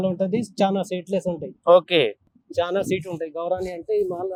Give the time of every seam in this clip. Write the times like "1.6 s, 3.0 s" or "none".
none